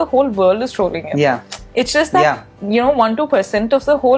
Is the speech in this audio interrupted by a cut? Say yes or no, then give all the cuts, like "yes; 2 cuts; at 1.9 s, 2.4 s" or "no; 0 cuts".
no; 0 cuts